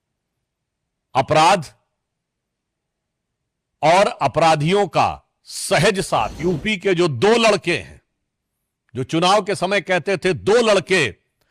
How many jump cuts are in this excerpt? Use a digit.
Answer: 1